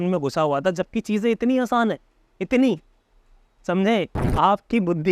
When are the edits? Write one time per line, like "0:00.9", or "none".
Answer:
0:04.2